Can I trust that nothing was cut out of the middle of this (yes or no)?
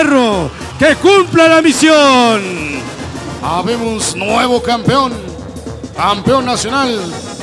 no